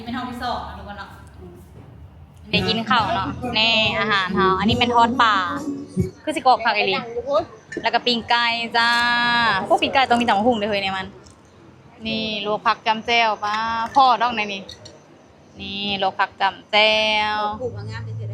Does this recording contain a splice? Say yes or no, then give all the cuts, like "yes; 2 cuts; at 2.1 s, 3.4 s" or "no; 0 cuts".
yes; 1 cut; at 2.5 s